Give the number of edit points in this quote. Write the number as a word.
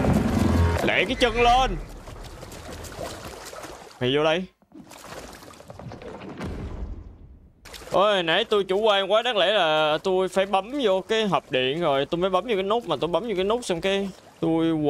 zero